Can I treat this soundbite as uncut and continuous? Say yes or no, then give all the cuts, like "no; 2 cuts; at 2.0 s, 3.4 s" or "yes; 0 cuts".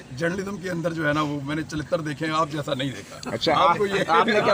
yes; 0 cuts